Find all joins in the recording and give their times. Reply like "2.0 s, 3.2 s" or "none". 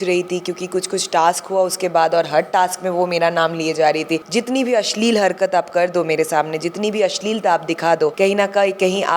4.2 s, 8.1 s